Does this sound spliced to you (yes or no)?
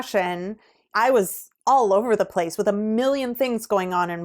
yes